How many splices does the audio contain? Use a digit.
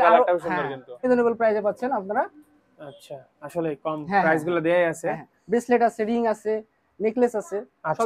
1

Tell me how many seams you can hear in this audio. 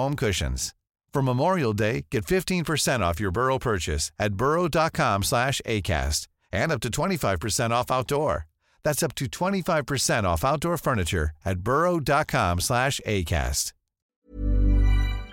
1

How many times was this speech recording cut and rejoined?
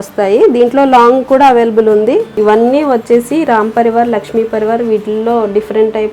1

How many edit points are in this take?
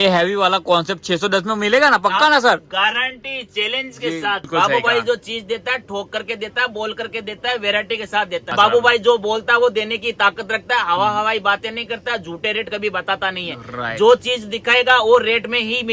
2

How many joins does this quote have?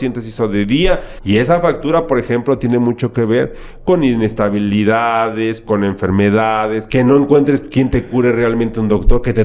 2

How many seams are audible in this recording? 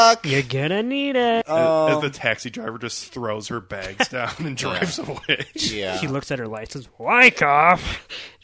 1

